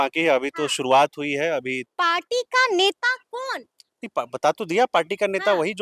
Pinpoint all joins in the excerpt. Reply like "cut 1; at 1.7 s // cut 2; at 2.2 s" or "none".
cut 1; at 1.9 s